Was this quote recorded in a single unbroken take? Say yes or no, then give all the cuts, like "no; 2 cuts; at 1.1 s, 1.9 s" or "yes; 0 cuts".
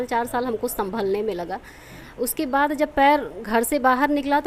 yes; 0 cuts